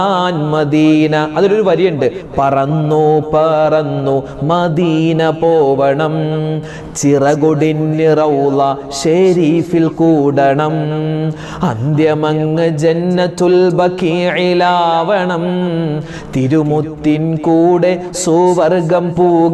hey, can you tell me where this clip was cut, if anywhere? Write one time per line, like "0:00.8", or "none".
none